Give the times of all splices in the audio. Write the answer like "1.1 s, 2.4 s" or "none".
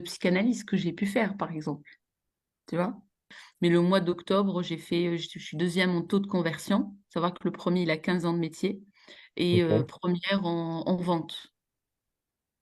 3.4 s